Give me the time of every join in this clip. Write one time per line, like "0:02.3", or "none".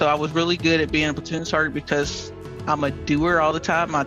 none